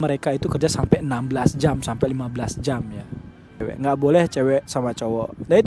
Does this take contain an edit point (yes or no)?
yes